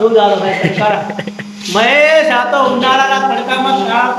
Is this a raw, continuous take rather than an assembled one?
yes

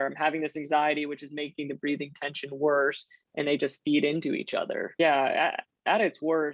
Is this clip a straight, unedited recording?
no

